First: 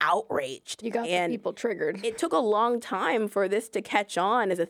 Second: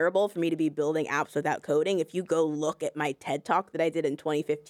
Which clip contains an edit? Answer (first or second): first